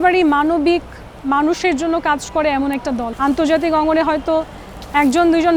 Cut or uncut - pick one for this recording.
cut